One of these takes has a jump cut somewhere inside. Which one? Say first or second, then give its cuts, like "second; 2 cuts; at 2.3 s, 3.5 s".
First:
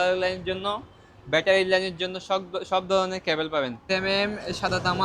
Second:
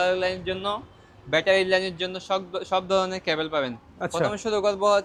first; 1 cut; at 3.8 s